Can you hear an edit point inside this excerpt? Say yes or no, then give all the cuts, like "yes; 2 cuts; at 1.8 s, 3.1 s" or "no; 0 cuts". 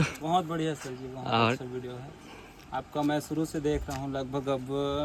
no; 0 cuts